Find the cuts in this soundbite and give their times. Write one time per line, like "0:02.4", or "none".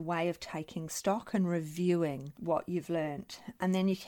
0:02.3